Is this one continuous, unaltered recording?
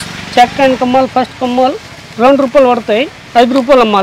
yes; 0 cuts

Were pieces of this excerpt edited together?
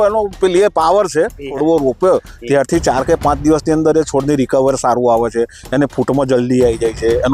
yes; 1 cut; at 1.5 s

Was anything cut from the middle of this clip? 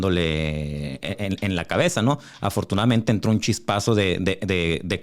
no; 0 cuts

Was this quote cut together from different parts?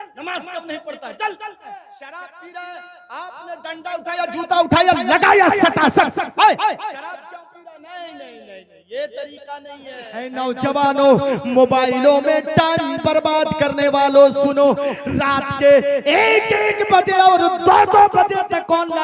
yes; 2 cuts; at 1.7 s, 10.3 s

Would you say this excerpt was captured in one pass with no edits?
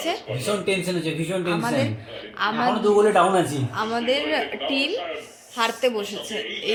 yes; 0 cuts

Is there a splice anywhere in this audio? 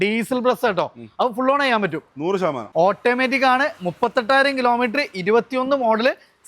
yes; 1 cut; at 2.6 s

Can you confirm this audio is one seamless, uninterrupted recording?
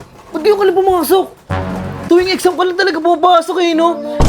no; 1 cut; at 1.9 s

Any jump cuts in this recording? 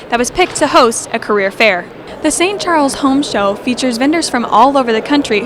yes; 1 cut; at 2.0 s

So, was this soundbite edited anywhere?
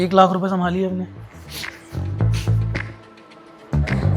no; 0 cuts

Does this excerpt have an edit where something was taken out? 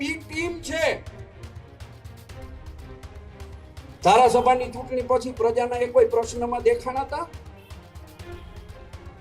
no; 0 cuts

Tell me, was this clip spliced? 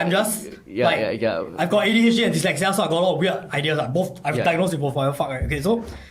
no; 0 cuts

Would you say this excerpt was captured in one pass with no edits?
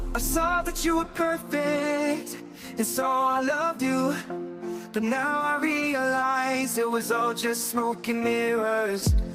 yes; 0 cuts

